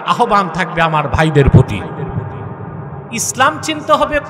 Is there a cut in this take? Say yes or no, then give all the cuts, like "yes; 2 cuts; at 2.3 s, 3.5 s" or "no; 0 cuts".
yes; 1 cut; at 3.0 s